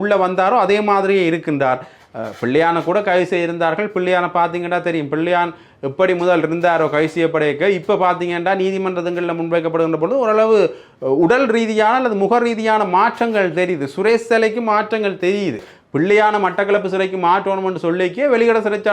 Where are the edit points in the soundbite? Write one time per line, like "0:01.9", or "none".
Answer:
0:15.7